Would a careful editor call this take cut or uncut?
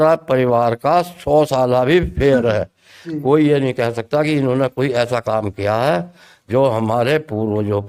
uncut